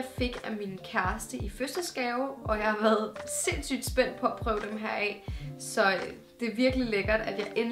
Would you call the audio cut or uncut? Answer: cut